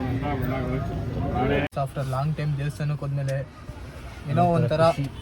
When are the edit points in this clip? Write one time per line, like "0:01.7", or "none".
0:01.7